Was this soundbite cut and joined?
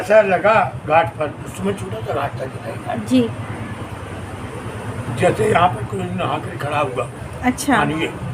no; 0 cuts

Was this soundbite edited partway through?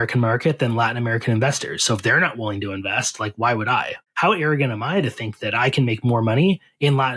yes; 1 cut; at 4.0 s

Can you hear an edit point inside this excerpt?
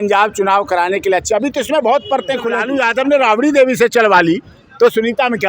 yes; 1 cut; at 2.6 s

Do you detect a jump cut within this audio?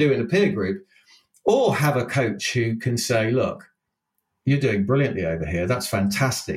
no; 0 cuts

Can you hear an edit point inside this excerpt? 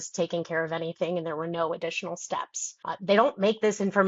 no; 0 cuts

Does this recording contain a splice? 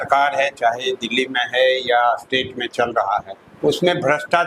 yes; 1 cut; at 3.4 s

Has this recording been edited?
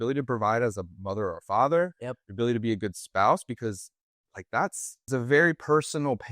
yes; 1 cut; at 5.0 s

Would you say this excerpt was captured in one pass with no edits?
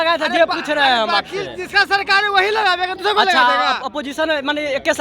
yes; 0 cuts

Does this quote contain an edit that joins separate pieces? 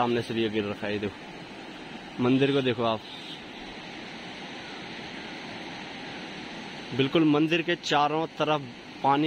no; 0 cuts

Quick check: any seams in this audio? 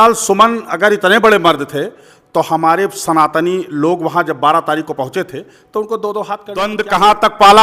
yes; 1 cut; at 6.7 s

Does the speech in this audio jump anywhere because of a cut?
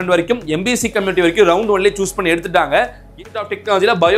yes; 1 cut; at 3.1 s

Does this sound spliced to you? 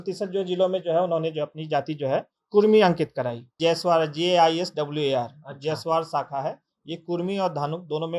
yes; 1 cut; at 3.5 s

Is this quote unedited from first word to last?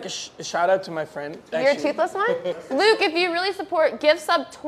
no; 2 cuts; at 1.4 s, 2.5 s

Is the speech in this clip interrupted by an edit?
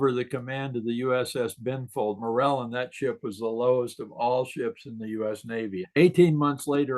yes; 2 cuts; at 2.2 s, 5.9 s

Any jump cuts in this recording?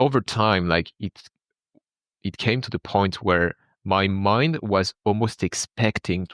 no; 0 cuts

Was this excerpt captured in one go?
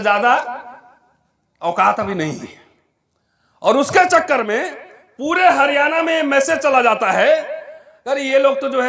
yes; 0 cuts

